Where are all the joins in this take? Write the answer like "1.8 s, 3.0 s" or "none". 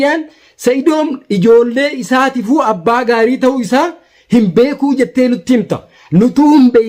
none